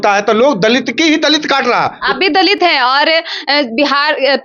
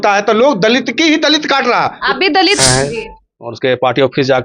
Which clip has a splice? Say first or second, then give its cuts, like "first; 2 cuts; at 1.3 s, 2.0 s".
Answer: second; 1 cut; at 2.6 s